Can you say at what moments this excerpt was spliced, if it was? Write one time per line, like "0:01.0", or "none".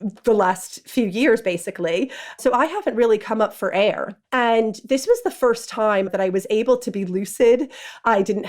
0:02.3
0:04.1
0:06.1

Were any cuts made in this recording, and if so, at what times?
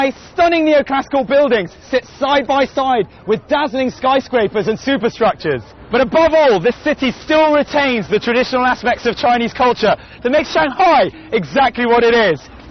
0:05.4

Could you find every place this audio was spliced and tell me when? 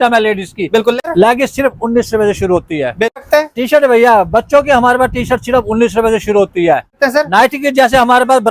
0:01.0
0:03.2
0:07.0

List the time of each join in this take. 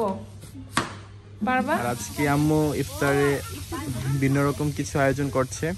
0:02.0

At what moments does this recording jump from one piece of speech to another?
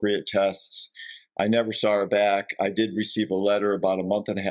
none

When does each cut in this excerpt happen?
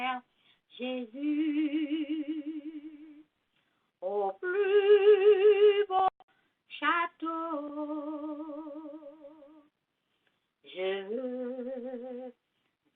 0:04.5

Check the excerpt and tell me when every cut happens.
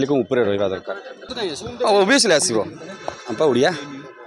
0:01.3

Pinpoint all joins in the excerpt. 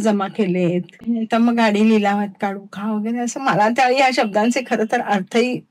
0:00.9

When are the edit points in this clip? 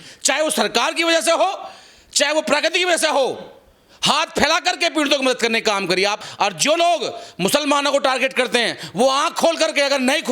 0:06.2

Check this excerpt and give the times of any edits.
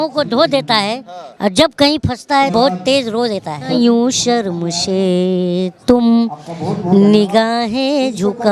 0:02.5
0:03.7

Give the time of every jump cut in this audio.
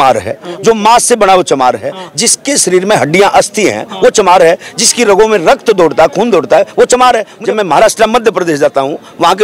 0:07.3

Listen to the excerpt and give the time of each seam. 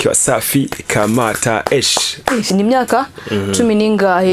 0:02.5

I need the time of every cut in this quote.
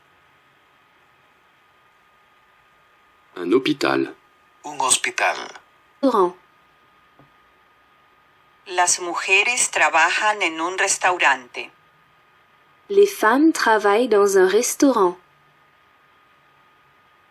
none

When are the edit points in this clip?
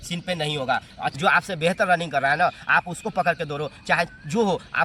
0:01.1

